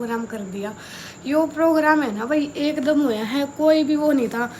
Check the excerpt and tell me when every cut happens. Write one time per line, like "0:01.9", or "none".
none